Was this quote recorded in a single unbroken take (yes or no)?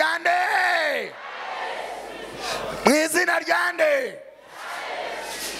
yes